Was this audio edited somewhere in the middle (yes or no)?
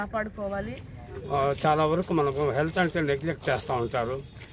yes